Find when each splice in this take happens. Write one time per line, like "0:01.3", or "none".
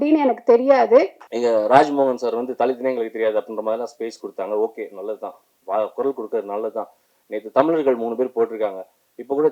0:01.2